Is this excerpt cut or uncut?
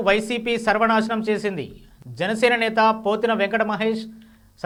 uncut